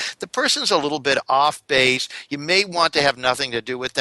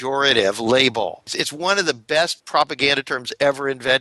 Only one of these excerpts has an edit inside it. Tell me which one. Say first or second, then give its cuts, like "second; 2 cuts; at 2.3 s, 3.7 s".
second; 2 cuts; at 1.4 s, 2.4 s